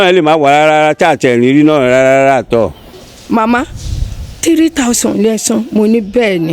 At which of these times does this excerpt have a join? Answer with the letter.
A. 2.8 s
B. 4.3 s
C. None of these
A